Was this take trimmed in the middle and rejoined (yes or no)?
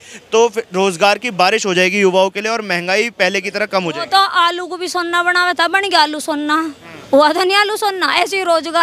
no